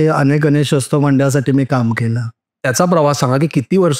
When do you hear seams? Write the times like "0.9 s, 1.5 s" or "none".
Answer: 2.5 s